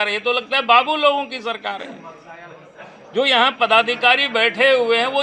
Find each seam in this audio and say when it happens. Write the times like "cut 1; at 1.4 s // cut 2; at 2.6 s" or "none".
none